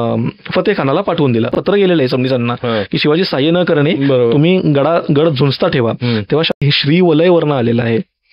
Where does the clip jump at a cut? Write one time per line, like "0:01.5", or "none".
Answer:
0:01.6
0:06.6